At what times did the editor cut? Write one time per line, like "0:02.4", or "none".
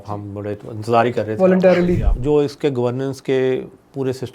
0:02.0